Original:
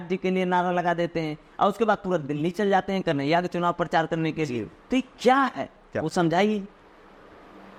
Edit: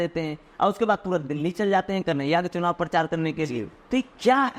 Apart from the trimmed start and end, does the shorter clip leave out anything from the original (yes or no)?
no